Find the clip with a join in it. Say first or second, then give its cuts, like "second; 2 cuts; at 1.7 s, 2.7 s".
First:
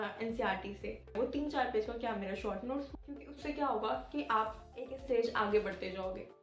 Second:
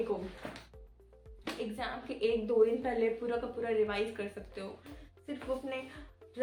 first; 2 cuts; at 1.1 s, 2.9 s